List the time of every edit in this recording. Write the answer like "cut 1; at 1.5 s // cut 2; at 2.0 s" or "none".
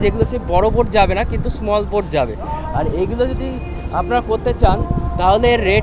none

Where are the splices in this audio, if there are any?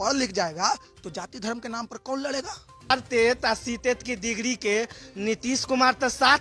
cut 1; at 2.9 s

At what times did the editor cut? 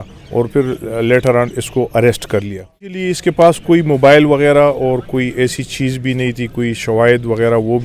cut 1; at 3.0 s

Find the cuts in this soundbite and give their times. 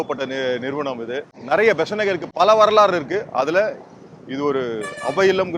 cut 1; at 1.3 s // cut 2; at 2.3 s

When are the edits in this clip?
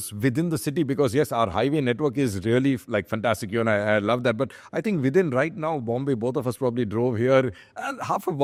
none

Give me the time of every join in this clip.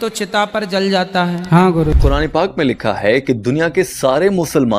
cut 1; at 2.0 s

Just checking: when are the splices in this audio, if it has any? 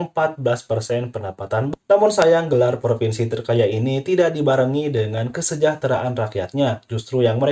cut 1; at 1.7 s

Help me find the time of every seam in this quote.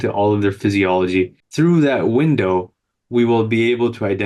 cut 1; at 1.4 s

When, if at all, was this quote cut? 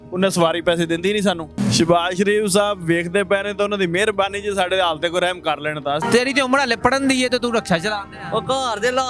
cut 1; at 1.5 s // cut 2; at 6.0 s

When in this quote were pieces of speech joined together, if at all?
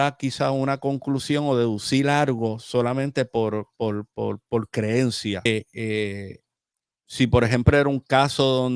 cut 1; at 5.5 s

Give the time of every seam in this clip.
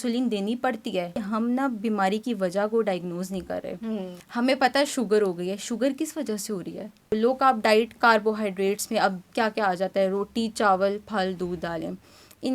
cut 1; at 1.2 s // cut 2; at 4.2 s // cut 3; at 7.1 s

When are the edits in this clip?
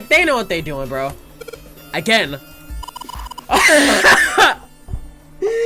none

